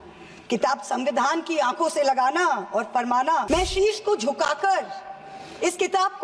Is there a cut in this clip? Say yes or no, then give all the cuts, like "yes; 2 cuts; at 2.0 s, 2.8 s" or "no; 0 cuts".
yes; 1 cut; at 3.5 s